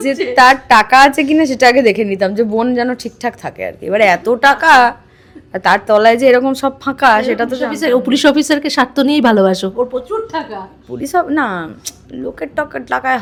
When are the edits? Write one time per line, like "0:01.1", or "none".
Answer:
none